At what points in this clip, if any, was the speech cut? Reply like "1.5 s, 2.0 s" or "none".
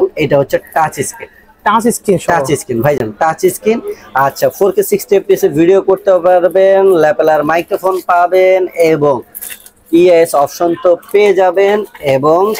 none